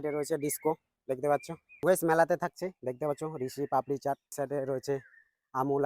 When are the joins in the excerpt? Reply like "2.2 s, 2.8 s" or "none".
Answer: 1.7 s, 4.3 s